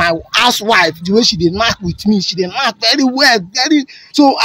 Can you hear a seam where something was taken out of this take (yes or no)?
no